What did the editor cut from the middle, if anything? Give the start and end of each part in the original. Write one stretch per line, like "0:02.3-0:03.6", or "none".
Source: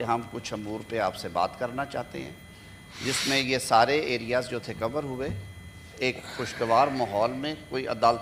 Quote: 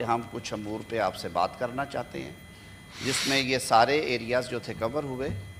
none